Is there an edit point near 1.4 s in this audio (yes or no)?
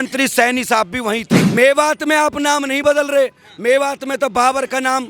yes